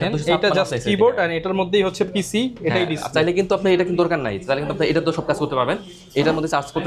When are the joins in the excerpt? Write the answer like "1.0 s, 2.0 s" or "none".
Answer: none